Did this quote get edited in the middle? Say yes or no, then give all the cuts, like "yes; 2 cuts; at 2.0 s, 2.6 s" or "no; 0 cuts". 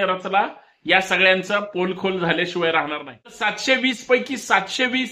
yes; 1 cut; at 3.5 s